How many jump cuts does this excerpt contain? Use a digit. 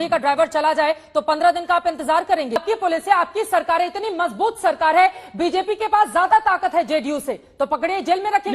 1